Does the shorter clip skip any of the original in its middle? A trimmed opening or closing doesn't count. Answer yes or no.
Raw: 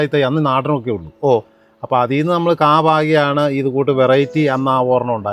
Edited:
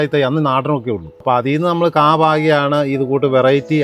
yes